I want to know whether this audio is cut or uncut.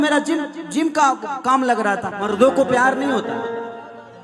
cut